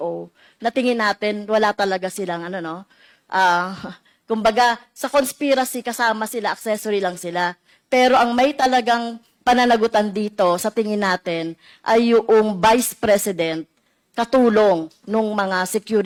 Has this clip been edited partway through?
no; 0 cuts

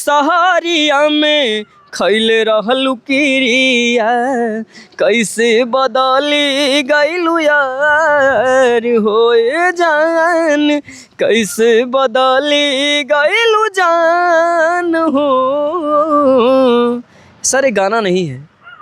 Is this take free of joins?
yes; 0 cuts

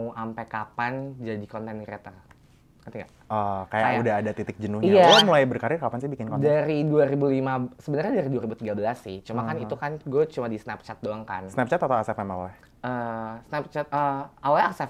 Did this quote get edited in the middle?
no; 0 cuts

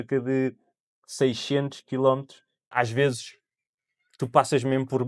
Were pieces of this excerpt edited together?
yes; 1 cut; at 2.7 s

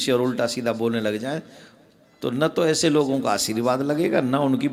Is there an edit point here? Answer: no; 0 cuts

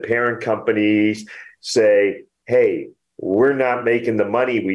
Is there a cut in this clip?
no; 0 cuts

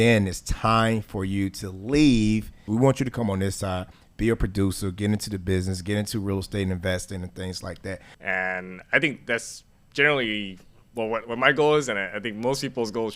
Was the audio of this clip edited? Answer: yes; 2 cuts; at 2.6 s, 8.1 s

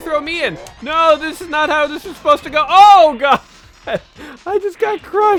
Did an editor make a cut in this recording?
no; 0 cuts

